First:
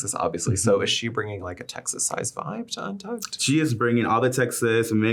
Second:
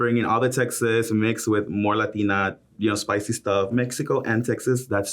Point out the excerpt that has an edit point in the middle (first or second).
second